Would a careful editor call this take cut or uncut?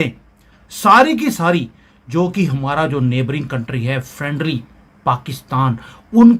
uncut